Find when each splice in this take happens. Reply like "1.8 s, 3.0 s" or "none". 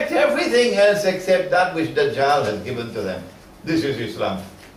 1.0 s